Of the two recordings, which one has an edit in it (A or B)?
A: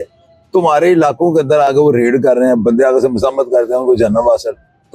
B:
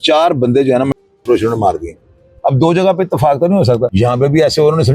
B